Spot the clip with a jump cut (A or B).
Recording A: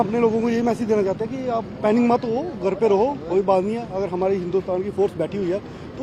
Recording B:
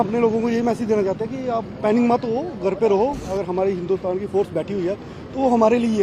B